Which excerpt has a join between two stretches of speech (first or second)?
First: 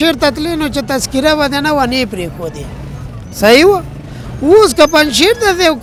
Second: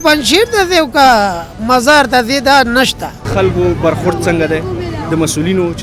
second